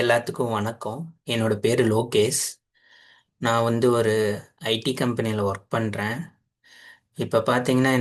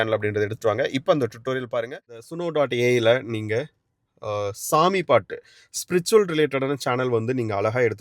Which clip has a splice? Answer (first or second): second